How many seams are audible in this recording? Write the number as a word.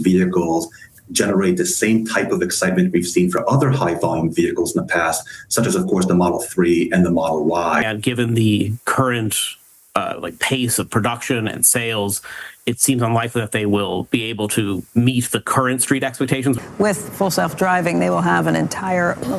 two